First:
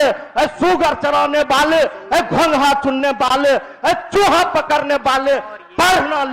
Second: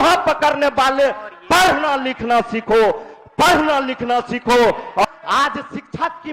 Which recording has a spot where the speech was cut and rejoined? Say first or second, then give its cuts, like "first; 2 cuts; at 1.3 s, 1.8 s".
second; 1 cut; at 5.1 s